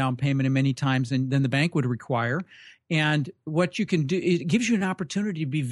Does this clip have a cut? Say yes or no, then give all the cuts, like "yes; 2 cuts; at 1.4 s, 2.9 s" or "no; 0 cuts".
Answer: no; 0 cuts